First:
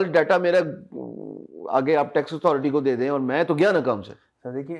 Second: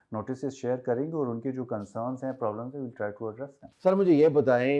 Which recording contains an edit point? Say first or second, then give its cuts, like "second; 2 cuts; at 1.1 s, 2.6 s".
second; 1 cut; at 3.6 s